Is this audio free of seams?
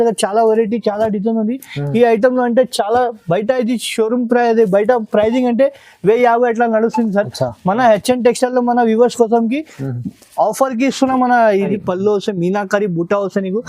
no; 1 cut; at 11.7 s

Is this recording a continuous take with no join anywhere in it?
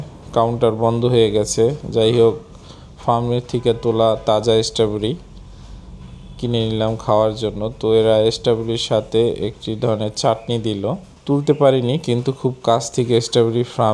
no; 1 cut; at 11.1 s

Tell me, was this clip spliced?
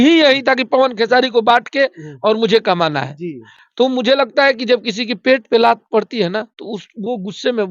no; 0 cuts

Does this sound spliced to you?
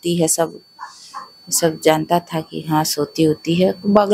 no; 0 cuts

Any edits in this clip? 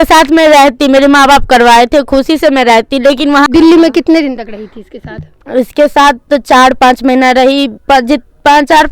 yes; 1 cut; at 3.5 s

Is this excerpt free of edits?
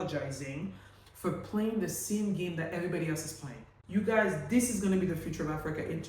no; 1 cut; at 3.7 s

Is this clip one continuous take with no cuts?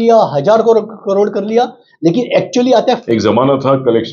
no; 1 cut; at 2.8 s

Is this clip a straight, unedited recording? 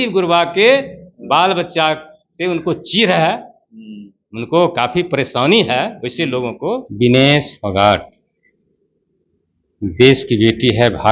no; 1 cut; at 6.9 s

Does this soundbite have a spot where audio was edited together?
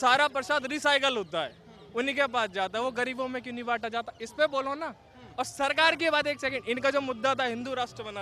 no; 0 cuts

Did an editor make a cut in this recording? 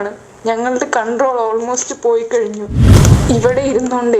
yes; 1 cut; at 3.0 s

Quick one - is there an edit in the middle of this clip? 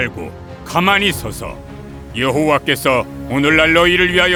no; 0 cuts

